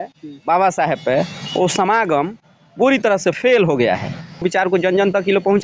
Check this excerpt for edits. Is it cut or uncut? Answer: cut